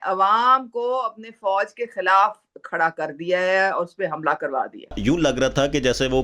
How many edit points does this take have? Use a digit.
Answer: 1